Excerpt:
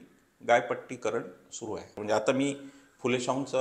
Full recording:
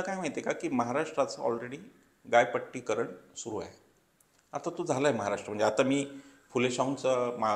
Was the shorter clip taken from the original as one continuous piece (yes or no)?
no